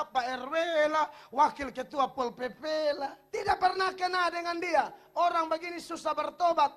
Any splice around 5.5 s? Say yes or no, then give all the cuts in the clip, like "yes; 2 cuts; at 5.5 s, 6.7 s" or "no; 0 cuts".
no; 1 cut; at 3.2 s